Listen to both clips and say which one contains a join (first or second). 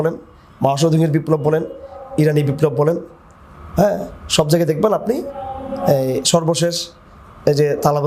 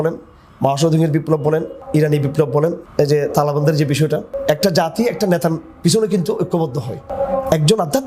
second